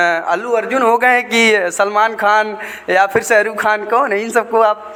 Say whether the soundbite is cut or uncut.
uncut